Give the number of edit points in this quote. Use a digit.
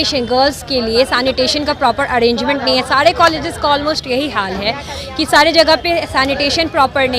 0